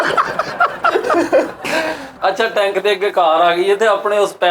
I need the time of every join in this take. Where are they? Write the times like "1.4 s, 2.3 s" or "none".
2.0 s